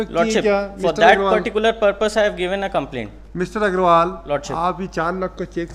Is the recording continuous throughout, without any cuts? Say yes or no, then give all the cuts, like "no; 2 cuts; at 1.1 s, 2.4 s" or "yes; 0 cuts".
yes; 0 cuts